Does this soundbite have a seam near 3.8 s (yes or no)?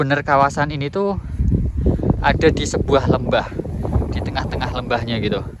no